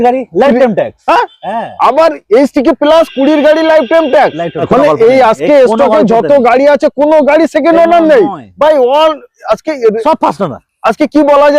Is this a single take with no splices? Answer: no; 1 cut; at 4.6 s

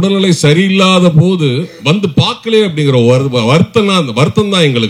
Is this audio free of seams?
yes; 0 cuts

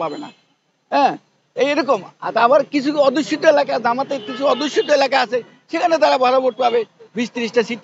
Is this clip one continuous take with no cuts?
yes; 0 cuts

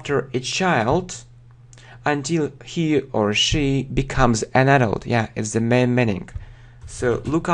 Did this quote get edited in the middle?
yes; 1 cut; at 4.4 s

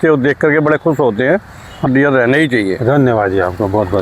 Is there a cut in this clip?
no; 0 cuts

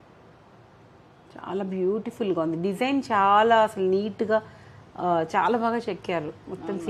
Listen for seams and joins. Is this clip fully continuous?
yes; 0 cuts

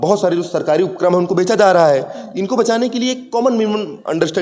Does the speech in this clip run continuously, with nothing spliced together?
yes; 0 cuts

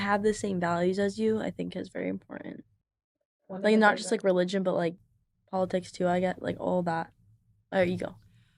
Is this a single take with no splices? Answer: yes; 0 cuts

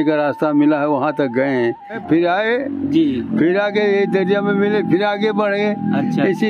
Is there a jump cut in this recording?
yes; 1 cut; at 2.0 s

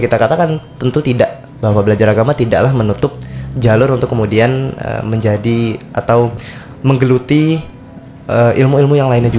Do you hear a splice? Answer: no; 0 cuts

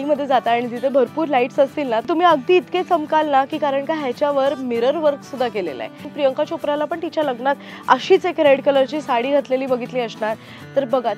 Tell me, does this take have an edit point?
yes; 2 cuts; at 2.0 s, 6.0 s

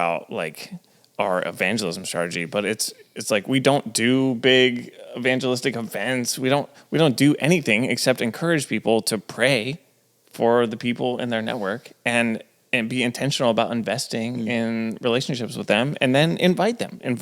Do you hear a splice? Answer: no; 0 cuts

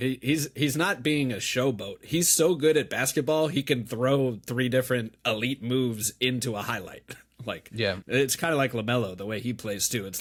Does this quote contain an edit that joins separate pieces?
no; 0 cuts

